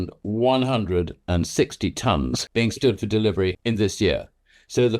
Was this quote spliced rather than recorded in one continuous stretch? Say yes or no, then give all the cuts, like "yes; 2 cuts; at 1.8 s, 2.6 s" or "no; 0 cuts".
yes; 2 cuts; at 2.4 s, 3.6 s